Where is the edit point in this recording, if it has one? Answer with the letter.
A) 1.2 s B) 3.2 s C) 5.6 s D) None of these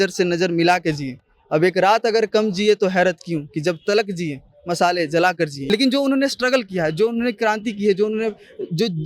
C